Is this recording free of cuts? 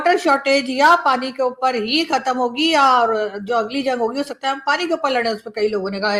yes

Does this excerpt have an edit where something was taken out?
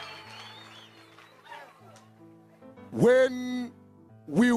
no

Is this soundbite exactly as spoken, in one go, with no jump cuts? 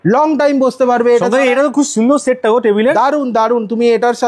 yes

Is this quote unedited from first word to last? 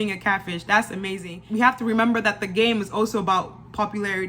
no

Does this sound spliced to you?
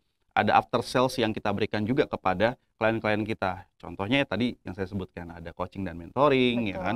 no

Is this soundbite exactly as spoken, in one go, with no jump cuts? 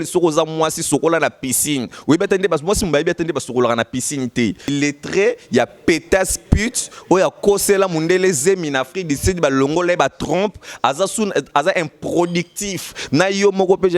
no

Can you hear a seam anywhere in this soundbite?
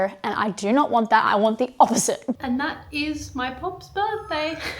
yes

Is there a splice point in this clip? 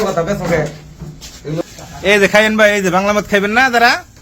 yes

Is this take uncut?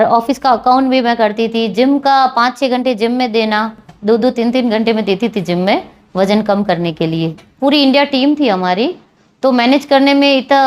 no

